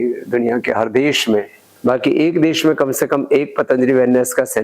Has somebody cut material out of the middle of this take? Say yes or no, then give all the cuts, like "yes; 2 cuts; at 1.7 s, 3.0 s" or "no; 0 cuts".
yes; 1 cut; at 1.6 s